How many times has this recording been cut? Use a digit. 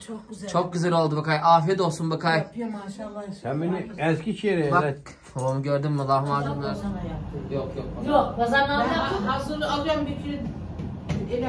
1